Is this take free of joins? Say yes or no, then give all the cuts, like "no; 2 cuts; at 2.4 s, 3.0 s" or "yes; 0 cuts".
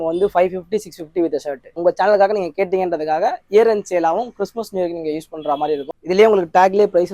no; 2 cuts; at 1.8 s, 5.8 s